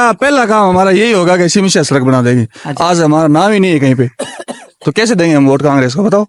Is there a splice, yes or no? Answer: no